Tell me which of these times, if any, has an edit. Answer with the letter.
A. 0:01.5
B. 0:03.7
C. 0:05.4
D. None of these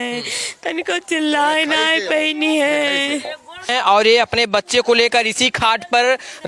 B